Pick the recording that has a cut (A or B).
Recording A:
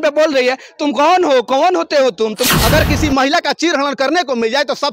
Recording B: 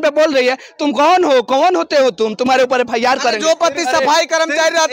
A